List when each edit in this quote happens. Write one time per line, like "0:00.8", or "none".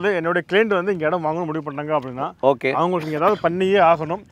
none